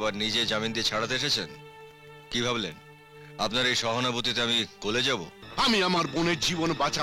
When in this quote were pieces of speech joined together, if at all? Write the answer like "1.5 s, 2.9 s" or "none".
5.4 s